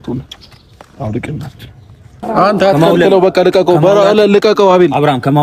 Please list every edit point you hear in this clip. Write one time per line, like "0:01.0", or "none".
0:02.2